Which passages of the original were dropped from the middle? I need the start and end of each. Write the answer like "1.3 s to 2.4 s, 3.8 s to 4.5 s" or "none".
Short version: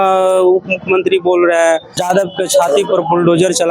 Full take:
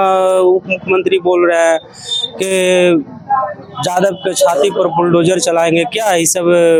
1.9 s to 3.8 s